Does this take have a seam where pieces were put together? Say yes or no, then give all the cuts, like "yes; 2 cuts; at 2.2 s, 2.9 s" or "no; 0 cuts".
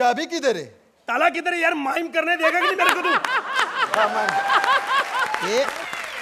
no; 0 cuts